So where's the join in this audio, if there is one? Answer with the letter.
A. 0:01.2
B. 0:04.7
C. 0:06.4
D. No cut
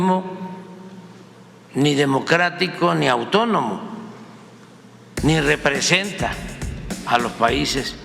D